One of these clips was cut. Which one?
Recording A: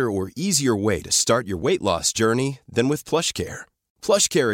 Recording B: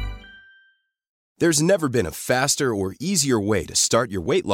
B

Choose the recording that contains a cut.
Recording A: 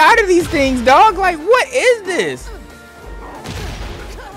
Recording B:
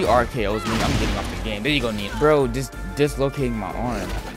B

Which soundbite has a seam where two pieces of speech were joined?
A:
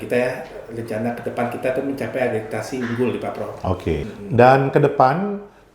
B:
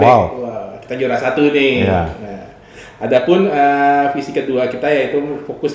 A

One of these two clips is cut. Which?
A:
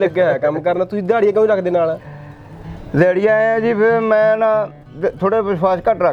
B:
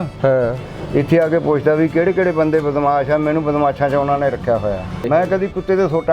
B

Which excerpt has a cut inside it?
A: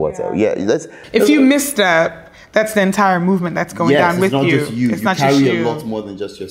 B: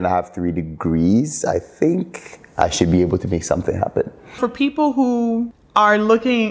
B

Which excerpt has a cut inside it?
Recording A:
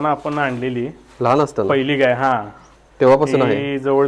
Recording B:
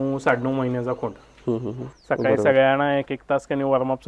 B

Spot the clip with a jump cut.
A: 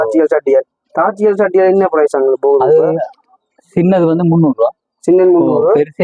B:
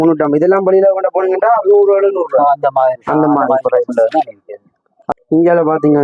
B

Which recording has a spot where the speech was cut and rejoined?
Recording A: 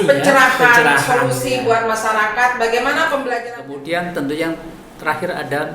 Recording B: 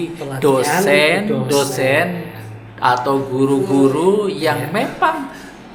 A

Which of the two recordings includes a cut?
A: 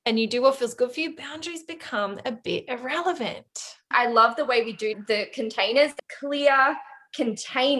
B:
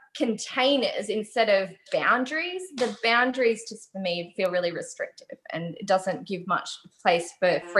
A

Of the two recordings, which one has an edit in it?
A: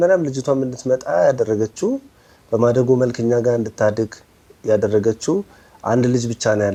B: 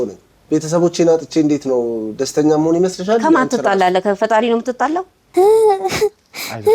B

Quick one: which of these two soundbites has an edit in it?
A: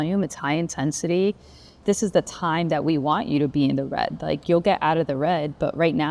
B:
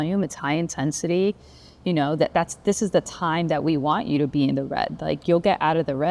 A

